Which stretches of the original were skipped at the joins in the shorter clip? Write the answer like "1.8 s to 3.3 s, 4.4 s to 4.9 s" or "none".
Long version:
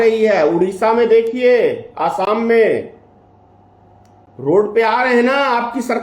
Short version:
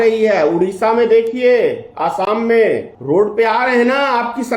2.9 s to 4.3 s